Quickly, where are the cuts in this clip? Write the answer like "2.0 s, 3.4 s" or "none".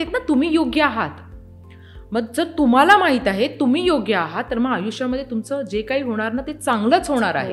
none